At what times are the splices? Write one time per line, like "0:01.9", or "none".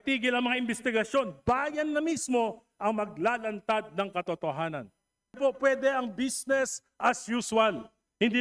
0:05.4